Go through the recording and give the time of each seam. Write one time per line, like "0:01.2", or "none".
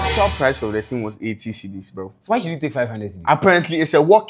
none